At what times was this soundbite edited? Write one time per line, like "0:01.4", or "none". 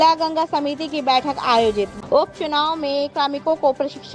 0:01.9